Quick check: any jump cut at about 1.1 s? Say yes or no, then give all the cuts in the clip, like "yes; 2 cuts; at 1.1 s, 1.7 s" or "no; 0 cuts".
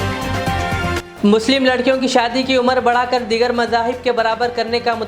yes; 1 cut; at 1.1 s